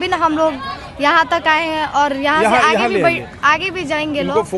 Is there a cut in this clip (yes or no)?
no